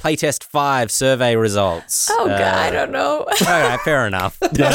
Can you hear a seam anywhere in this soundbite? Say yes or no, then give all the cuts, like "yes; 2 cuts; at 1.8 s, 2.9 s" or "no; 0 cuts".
no; 0 cuts